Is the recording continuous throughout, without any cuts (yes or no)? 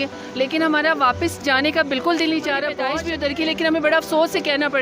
no